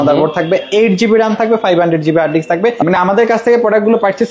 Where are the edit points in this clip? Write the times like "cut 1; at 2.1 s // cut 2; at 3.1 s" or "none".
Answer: cut 1; at 2.8 s